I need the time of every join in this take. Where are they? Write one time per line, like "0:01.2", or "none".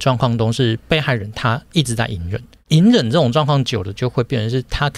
0:02.6